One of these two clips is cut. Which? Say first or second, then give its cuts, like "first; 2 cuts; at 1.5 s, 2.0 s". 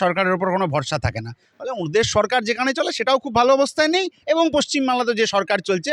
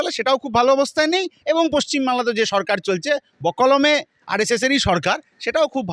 first; 1 cut; at 1.5 s